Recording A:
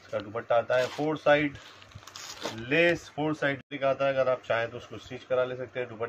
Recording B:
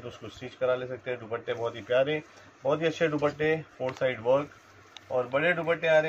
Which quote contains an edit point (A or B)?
A